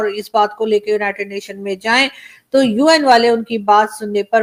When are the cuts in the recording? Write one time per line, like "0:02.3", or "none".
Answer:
none